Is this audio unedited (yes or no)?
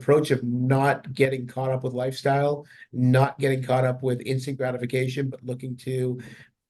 yes